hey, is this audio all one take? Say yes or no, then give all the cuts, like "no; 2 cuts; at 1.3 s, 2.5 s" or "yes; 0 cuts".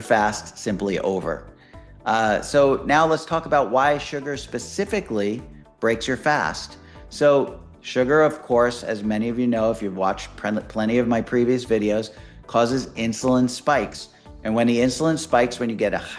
yes; 0 cuts